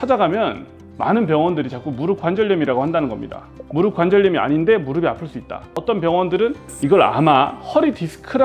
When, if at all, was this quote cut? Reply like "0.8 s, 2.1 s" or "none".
5.7 s

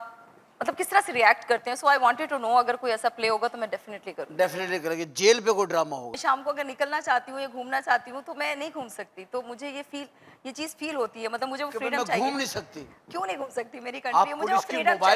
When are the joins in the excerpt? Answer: 6.1 s

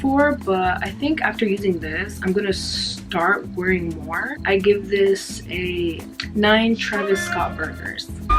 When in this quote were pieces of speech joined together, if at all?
4.4 s, 6.1 s

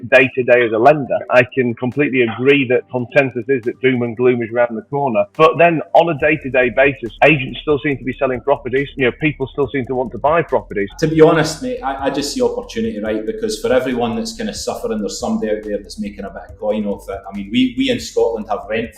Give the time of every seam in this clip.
1.2 s, 2.9 s, 10.9 s

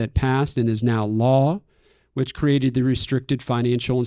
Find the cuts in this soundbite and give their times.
none

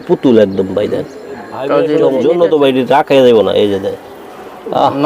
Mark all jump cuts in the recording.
2.0 s

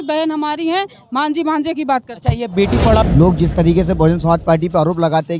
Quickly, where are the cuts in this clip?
3.0 s

